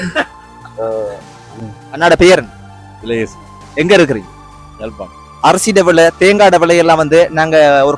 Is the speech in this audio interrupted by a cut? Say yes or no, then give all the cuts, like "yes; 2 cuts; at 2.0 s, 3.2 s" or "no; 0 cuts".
no; 0 cuts